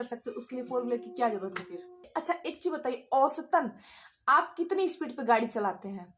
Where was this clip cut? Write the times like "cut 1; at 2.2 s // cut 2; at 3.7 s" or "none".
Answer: cut 1; at 2.0 s